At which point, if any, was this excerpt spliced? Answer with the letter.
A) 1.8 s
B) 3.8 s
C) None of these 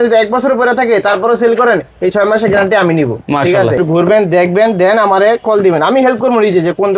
B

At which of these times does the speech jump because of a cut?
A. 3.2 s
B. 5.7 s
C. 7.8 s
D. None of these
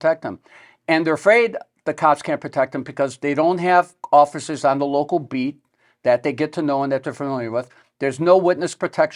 D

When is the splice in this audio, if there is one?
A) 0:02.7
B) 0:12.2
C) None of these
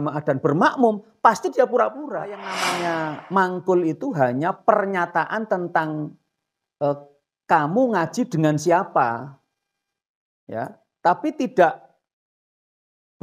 A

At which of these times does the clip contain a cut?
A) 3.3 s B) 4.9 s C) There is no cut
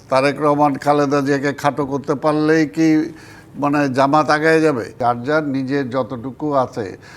B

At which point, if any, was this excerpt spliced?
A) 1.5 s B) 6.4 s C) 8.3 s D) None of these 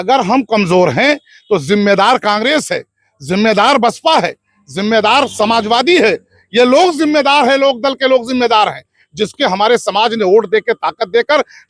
D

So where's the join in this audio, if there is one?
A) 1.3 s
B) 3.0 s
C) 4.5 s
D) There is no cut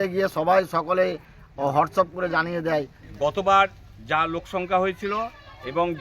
B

